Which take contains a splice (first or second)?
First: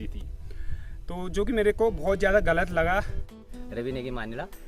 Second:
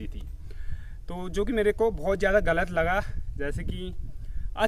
first